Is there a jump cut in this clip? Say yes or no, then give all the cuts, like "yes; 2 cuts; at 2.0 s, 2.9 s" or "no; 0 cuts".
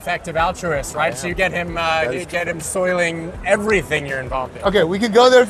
yes; 1 cut; at 4.5 s